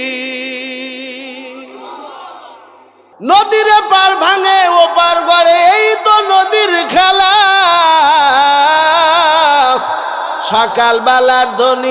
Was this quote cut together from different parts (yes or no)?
yes